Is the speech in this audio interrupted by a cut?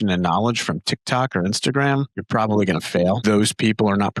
yes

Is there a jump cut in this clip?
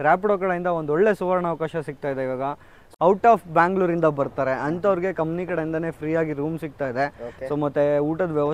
yes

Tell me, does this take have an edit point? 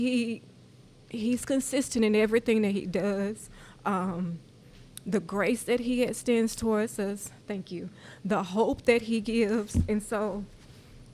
no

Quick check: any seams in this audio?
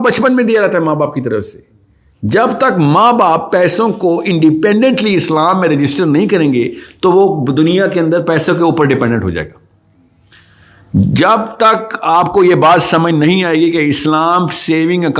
no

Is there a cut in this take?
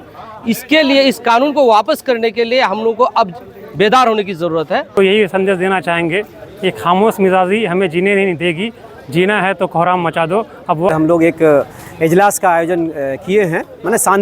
yes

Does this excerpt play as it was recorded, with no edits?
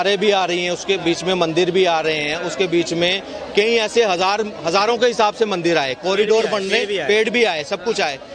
yes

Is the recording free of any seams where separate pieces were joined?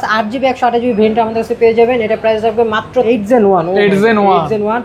no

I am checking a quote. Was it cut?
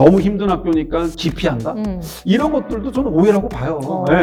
no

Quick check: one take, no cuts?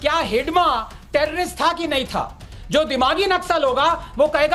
yes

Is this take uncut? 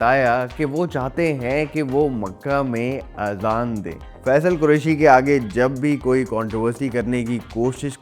no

